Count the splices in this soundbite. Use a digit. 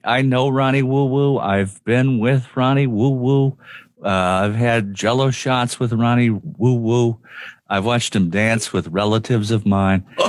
0